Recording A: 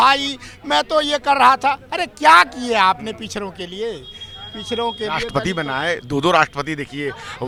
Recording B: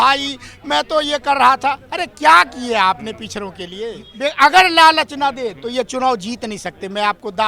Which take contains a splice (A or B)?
B